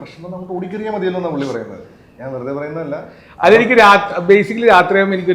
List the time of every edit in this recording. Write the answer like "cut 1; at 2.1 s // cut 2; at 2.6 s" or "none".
none

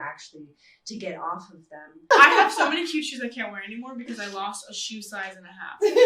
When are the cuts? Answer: cut 1; at 2.1 s

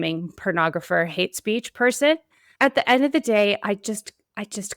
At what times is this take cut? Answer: cut 1; at 2.4 s

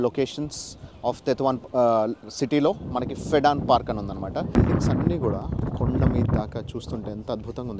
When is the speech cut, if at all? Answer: cut 1; at 4.5 s

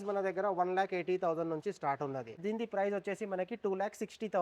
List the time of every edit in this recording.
cut 1; at 2.4 s

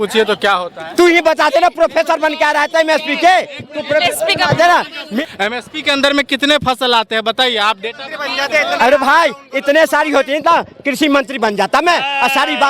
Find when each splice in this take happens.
cut 1; at 5.1 s

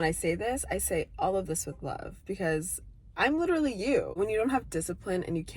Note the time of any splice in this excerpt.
cut 1; at 4.2 s

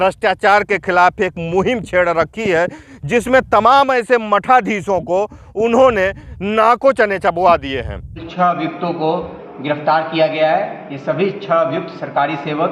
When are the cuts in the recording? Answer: cut 1; at 8.2 s

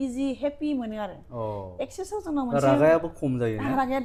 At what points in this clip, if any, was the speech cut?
none

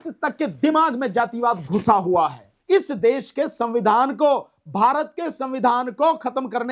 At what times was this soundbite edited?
cut 1; at 2.5 s

